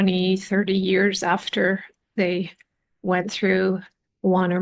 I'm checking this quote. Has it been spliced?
no; 0 cuts

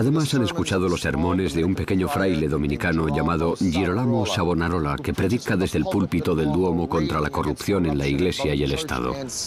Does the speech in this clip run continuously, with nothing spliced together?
no; 1 cut; at 4.9 s

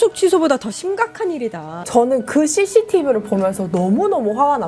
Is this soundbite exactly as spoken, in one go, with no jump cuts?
no; 1 cut; at 1.8 s

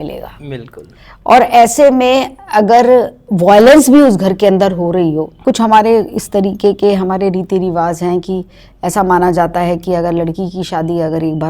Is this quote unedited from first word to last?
no; 1 cut; at 5.4 s

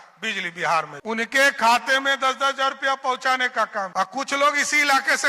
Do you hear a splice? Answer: yes; 2 cuts; at 1.0 s, 3.9 s

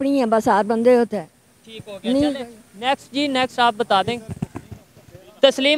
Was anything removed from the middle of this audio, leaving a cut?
no; 0 cuts

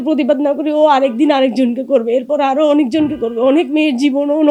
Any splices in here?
no; 0 cuts

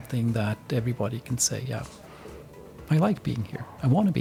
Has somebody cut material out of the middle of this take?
no; 0 cuts

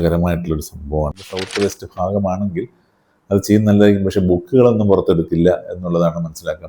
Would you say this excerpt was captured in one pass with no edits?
no; 1 cut; at 1.3 s

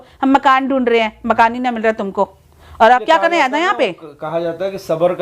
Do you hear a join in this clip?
yes; 1 cut; at 3.0 s

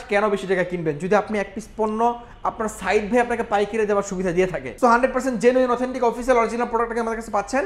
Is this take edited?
no; 0 cuts

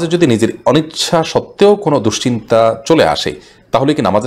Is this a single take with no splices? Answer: yes; 0 cuts

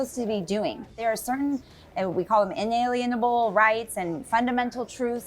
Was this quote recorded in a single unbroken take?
no; 1 cut; at 1.0 s

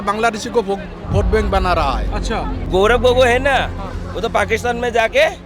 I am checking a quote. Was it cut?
yes; 1 cut; at 2.6 s

